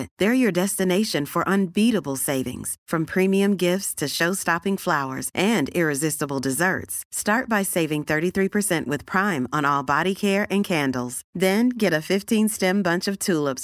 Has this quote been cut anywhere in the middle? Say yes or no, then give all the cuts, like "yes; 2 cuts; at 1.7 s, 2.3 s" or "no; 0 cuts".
no; 0 cuts